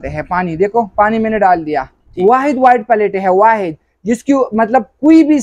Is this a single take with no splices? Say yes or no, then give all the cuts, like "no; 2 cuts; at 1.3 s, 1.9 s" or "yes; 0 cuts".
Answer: no; 1 cut; at 2.0 s